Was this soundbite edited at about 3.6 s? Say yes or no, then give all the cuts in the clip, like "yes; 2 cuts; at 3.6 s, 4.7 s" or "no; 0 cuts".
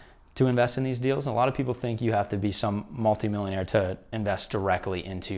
yes; 1 cut; at 3.6 s